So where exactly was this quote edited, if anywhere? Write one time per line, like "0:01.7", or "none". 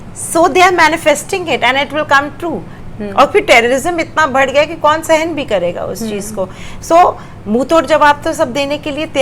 0:02.8

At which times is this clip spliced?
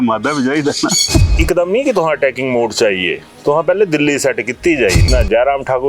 0:01.3
0:05.0

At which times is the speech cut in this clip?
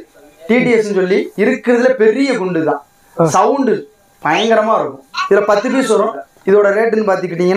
0:06.3

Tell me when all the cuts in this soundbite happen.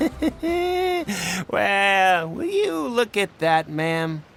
none

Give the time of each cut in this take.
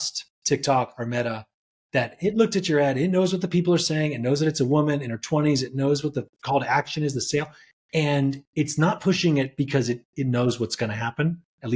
none

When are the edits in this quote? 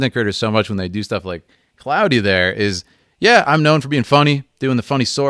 none

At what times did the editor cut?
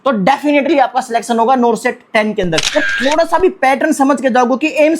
0:02.7

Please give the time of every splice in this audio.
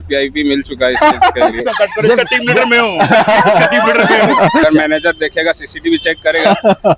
0:01.6
0:04.6

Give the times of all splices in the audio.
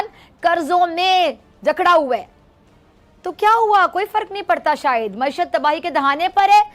none

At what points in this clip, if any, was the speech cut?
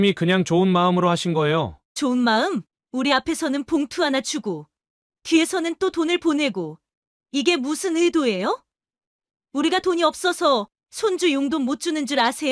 none

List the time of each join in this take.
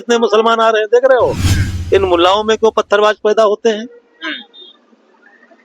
0:01.7

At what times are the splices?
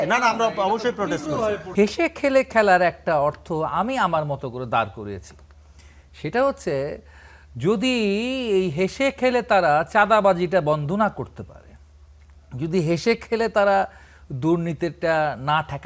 0:01.7

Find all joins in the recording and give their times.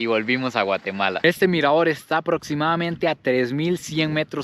0:01.1

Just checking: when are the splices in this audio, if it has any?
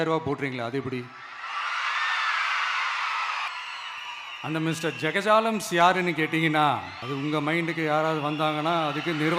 0:03.5
0:07.0

